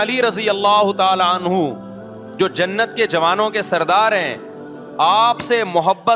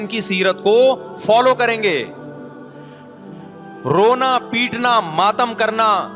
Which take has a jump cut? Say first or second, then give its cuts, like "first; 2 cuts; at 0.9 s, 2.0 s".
second; 2 cuts; at 2.1 s, 3.8 s